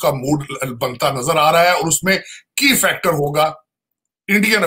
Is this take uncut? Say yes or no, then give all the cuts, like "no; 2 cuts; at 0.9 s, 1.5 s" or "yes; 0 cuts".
yes; 0 cuts